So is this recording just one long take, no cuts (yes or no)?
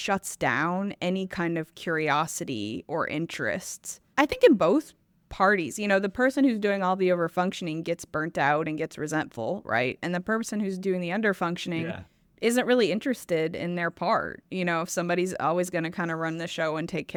yes